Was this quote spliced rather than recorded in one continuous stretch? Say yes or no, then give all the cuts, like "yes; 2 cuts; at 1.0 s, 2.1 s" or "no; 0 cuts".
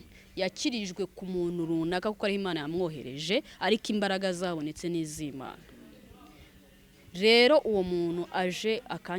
no; 0 cuts